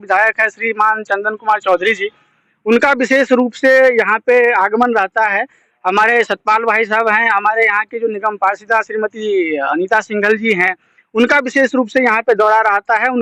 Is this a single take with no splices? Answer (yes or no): yes